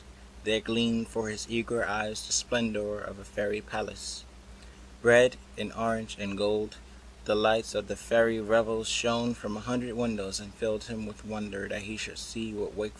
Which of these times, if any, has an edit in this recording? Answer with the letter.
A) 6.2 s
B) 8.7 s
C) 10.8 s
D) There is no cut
A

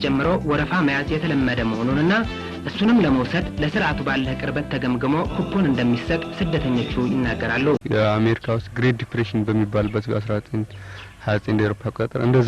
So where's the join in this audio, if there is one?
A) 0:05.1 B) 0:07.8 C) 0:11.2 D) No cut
B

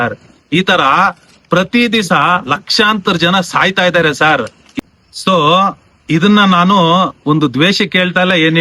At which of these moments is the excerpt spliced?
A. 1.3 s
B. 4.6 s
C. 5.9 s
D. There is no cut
B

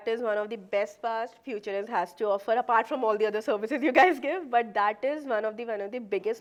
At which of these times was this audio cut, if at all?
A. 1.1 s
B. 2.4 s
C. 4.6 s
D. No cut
D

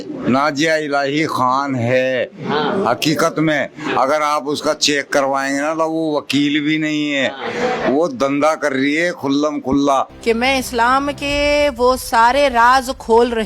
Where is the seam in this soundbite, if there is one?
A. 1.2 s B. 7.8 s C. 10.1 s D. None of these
C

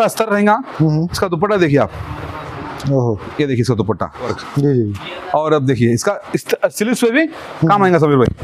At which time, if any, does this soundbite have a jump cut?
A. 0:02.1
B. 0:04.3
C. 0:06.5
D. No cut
B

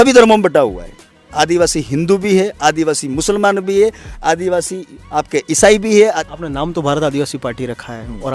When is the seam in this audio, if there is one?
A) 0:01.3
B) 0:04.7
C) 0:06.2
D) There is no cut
C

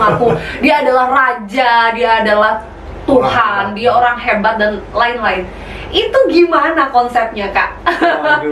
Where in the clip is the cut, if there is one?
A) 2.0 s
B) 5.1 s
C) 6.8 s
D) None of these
D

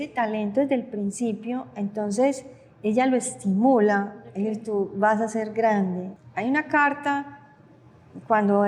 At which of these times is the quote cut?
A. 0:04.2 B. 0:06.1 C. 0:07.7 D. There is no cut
B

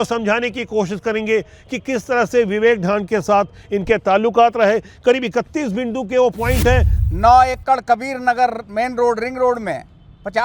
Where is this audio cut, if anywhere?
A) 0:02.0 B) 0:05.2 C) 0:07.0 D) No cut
C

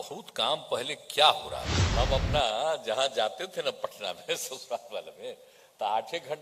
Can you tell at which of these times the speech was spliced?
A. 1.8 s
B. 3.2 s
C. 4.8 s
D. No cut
A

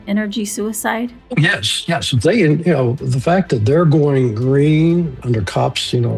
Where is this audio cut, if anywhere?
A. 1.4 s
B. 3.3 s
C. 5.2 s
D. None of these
C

